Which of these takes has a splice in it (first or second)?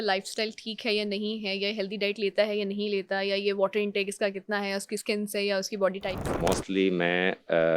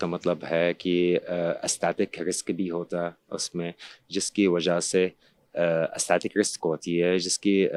first